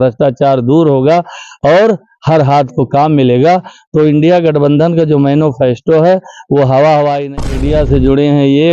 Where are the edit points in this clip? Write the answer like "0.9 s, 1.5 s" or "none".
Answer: 7.4 s